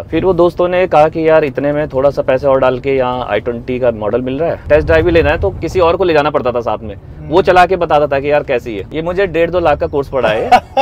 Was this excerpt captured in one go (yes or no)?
no